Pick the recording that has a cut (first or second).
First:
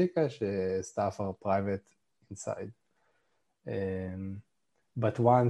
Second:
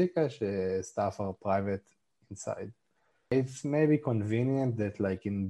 second